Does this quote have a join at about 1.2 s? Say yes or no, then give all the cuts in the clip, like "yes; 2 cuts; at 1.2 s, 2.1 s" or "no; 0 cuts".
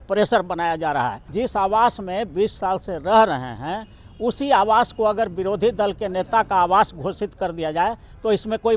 yes; 1 cut; at 1.2 s